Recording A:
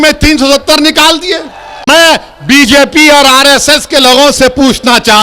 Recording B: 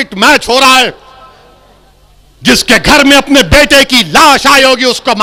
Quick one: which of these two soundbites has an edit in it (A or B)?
A